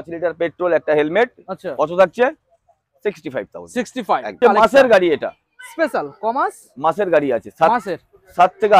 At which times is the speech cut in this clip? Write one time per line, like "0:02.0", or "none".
0:04.4